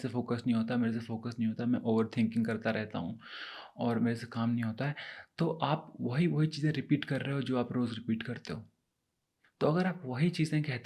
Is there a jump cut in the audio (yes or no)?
no